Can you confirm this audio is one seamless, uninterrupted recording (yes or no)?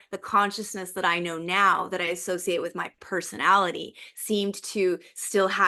yes